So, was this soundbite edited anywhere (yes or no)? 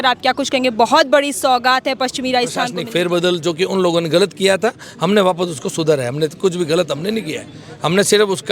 yes